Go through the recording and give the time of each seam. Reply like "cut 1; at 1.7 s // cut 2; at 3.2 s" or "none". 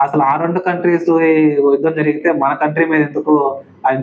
none